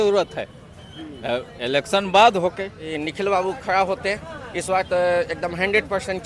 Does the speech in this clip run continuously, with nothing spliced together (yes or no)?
no